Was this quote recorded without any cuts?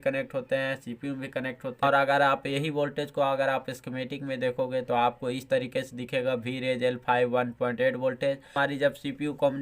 no; 2 cuts; at 1.8 s, 8.5 s

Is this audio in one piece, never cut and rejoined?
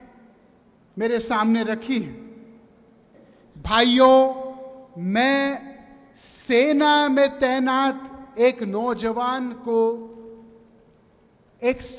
yes; 0 cuts

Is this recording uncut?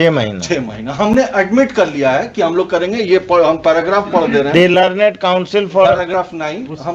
yes; 0 cuts

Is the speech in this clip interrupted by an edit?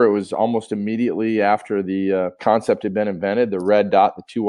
yes; 1 cut; at 2.4 s

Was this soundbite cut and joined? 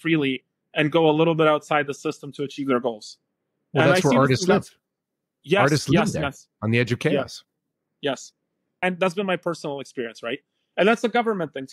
yes; 1 cut; at 8.8 s

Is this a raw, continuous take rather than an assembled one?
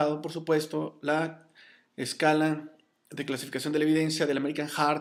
yes; 0 cuts

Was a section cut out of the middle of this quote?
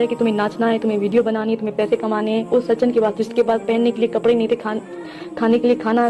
no; 0 cuts

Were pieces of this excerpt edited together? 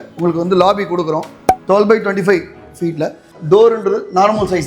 yes; 1 cut; at 3.3 s

